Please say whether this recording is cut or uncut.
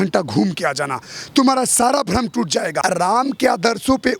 cut